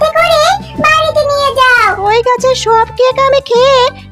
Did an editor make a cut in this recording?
yes; 1 cut; at 2.0 s

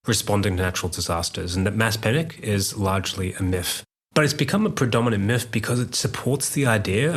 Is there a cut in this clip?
no; 0 cuts

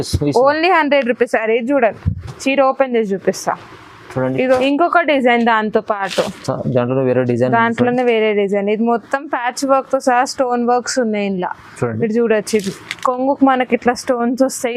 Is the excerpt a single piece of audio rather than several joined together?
no; 1 cut; at 4.4 s

